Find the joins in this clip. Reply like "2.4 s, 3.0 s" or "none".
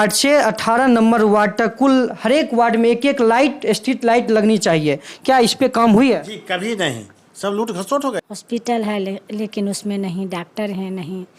8.2 s